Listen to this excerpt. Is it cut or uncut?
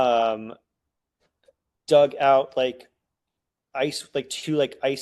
uncut